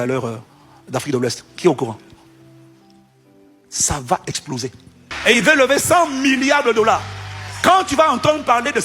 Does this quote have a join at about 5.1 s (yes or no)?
yes